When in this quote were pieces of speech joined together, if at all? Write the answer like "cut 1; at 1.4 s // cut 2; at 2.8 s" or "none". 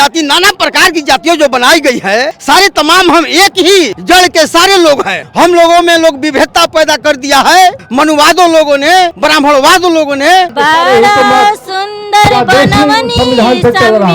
cut 1; at 2.3 s // cut 2; at 4.0 s // cut 3; at 5.2 s // cut 4; at 7.8 s // cut 5; at 9.2 s // cut 6; at 10.5 s